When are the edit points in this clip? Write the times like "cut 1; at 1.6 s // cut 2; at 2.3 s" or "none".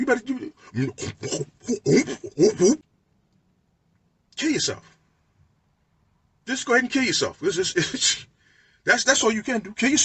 cut 1; at 2.8 s